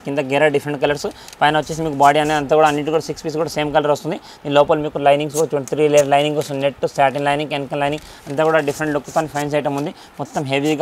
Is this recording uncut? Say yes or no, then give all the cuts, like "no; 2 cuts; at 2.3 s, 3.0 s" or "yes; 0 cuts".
yes; 0 cuts